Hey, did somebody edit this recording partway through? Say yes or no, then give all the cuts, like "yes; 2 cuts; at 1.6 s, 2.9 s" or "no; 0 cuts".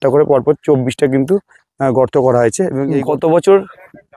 no; 0 cuts